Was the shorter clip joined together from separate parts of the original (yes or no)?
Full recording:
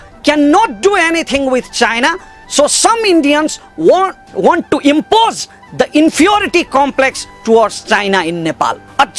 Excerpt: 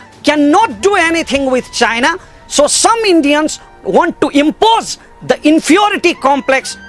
yes